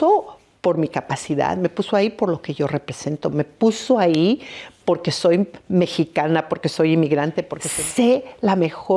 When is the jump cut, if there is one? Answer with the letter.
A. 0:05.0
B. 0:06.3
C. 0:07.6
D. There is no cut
C